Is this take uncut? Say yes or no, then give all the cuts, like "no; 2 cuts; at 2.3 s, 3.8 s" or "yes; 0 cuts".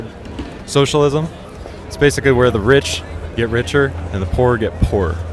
yes; 0 cuts